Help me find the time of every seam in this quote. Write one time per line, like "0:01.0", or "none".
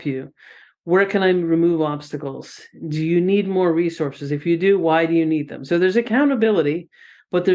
none